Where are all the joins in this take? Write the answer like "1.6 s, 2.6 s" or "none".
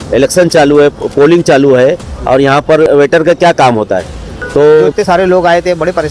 2.9 s, 4.9 s